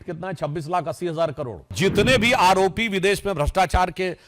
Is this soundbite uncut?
no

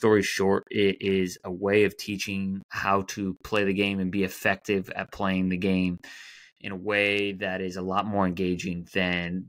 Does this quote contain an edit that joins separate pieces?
yes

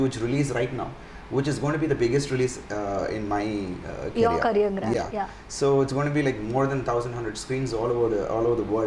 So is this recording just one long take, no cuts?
yes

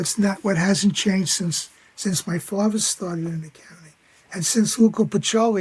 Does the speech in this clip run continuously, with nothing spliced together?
yes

